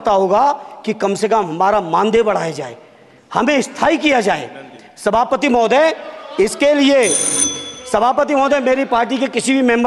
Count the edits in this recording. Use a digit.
0